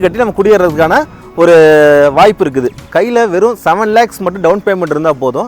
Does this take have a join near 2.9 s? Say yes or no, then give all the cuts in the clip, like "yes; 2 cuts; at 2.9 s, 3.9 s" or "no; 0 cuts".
yes; 1 cut; at 2.9 s